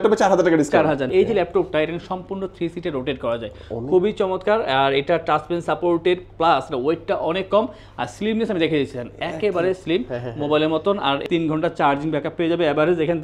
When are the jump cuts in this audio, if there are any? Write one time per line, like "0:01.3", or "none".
0:01.1
0:11.3